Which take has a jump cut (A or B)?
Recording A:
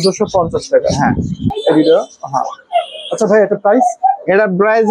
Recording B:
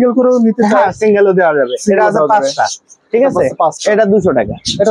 A